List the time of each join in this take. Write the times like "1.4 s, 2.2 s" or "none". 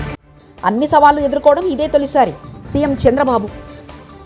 none